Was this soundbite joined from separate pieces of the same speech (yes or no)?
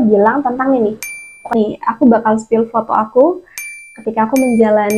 yes